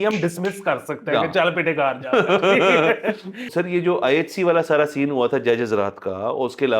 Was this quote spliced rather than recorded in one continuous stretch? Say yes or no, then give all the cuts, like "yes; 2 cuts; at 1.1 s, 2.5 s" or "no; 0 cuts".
yes; 1 cut; at 3.5 s